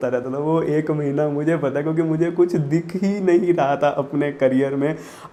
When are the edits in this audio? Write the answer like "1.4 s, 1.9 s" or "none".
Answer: none